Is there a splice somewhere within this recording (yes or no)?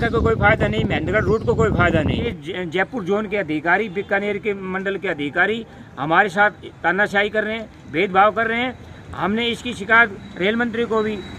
yes